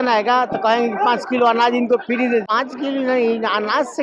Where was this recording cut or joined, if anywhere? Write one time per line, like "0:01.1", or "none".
0:02.5